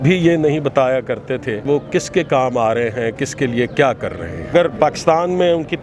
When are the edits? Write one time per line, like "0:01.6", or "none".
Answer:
0:01.6
0:04.5